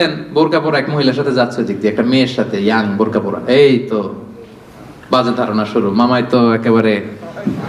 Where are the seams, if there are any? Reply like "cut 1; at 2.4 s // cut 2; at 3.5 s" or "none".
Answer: none